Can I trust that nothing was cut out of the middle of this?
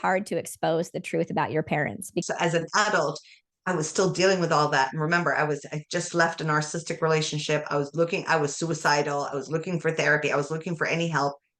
no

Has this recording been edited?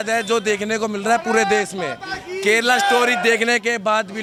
no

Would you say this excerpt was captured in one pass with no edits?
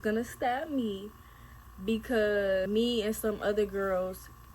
no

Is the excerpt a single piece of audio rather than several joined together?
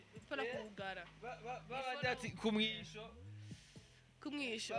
yes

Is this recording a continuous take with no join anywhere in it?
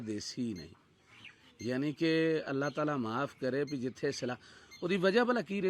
yes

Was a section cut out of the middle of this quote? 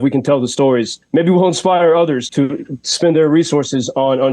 yes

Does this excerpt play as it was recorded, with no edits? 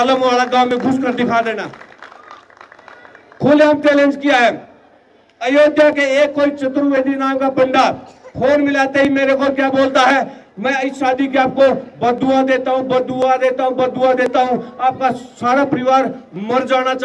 yes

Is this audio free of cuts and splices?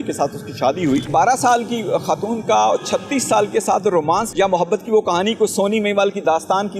no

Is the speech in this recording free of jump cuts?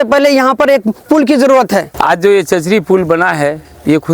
no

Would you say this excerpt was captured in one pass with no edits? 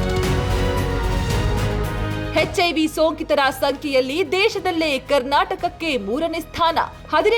yes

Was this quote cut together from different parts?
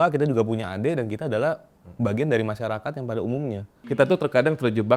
yes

